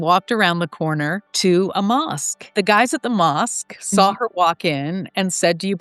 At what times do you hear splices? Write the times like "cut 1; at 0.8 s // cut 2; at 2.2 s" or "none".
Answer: cut 1; at 1.2 s // cut 2; at 2.5 s